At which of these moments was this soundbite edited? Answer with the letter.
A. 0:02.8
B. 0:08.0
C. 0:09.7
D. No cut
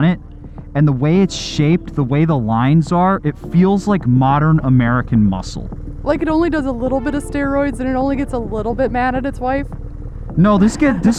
D